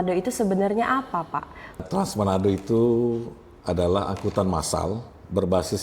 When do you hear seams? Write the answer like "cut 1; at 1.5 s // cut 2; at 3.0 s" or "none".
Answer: cut 1; at 1.8 s